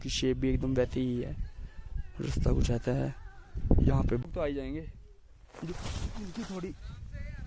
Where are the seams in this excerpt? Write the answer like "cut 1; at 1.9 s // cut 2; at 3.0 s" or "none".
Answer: cut 1; at 4.2 s

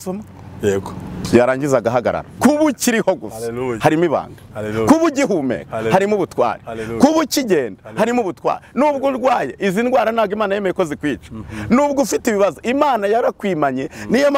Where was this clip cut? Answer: cut 1; at 2.3 s

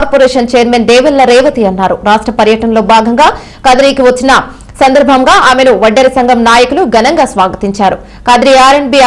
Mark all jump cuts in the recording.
none

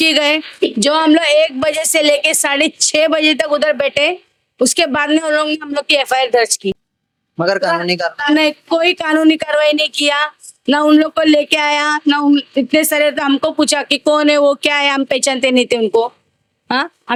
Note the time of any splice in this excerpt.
none

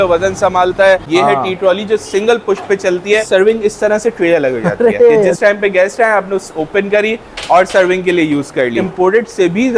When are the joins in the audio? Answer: cut 1; at 1.0 s // cut 2; at 3.2 s // cut 3; at 5.3 s // cut 4; at 8.9 s

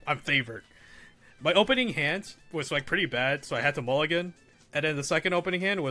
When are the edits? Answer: cut 1; at 2.4 s

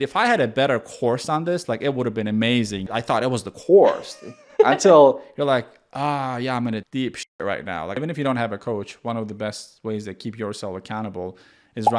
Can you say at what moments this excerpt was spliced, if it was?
cut 1; at 8.0 s

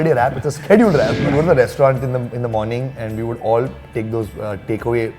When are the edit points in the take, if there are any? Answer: cut 1; at 1.2 s

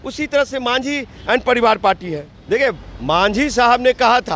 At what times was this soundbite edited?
cut 1; at 2.3 s

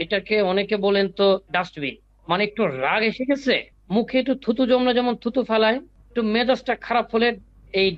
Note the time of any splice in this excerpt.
cut 1; at 2.1 s // cut 2; at 3.7 s // cut 3; at 6.0 s

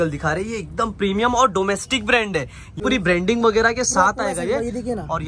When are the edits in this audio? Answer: cut 1; at 2.8 s

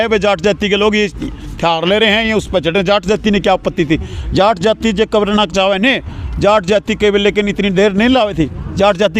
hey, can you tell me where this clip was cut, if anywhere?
none

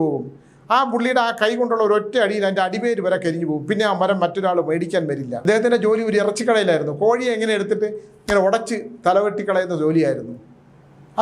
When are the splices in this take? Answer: cut 1; at 5.4 s

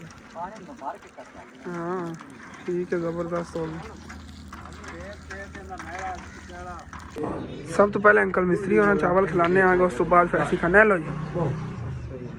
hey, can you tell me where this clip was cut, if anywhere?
cut 1; at 7.1 s

